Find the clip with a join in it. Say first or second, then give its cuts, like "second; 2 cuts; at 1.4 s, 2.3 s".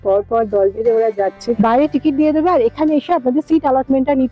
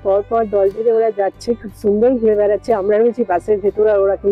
first; 1 cut; at 1.4 s